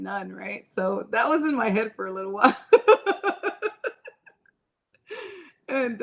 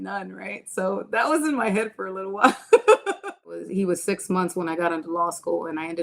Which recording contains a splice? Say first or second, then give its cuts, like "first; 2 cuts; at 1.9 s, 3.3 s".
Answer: second; 1 cut; at 3.6 s